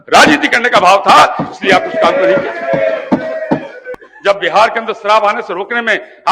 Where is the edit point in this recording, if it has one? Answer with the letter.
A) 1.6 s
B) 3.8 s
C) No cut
B